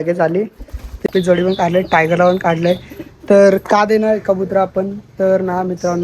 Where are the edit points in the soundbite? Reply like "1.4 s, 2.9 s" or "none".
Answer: 1.1 s